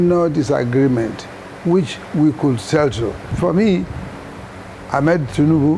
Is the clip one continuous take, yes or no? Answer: no